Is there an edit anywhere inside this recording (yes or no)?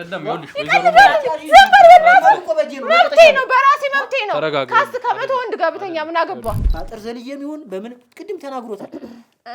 yes